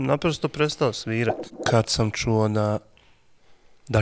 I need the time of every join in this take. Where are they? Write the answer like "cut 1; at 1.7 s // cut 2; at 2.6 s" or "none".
cut 1; at 1.5 s